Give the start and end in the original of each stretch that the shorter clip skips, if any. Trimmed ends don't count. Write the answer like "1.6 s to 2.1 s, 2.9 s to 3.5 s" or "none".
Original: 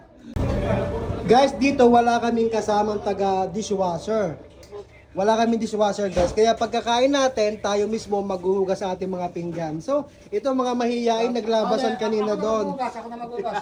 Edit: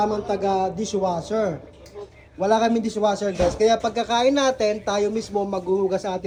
none